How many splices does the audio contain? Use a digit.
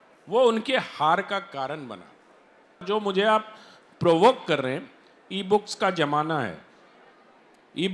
1